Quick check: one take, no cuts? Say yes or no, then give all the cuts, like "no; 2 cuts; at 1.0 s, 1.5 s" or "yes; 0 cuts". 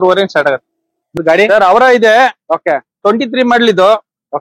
no; 1 cut; at 1.1 s